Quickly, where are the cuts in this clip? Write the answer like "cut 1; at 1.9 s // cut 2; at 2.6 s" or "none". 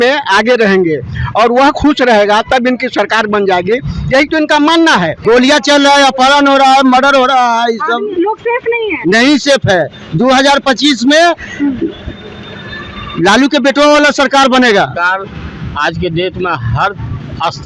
cut 1; at 5.2 s // cut 2; at 15.0 s